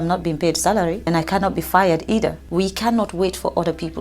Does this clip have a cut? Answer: yes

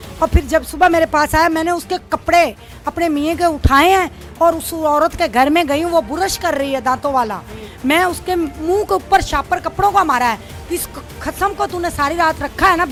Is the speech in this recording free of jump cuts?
yes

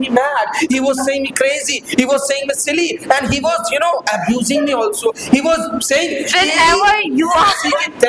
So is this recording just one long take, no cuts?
yes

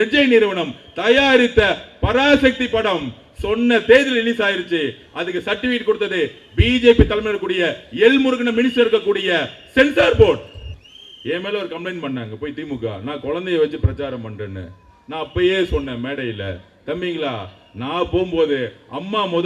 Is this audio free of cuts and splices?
no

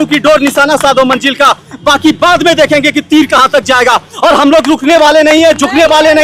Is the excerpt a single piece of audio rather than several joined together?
yes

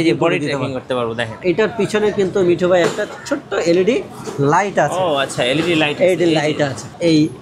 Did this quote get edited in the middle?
yes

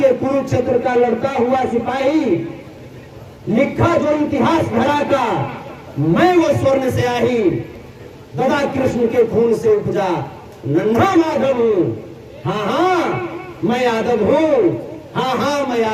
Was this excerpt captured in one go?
yes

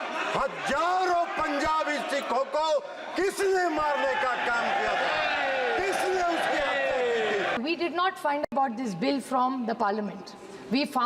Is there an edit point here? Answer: yes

